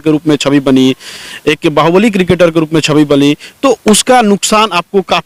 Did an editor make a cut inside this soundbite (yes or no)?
no